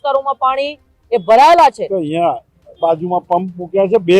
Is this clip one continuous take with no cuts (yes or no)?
no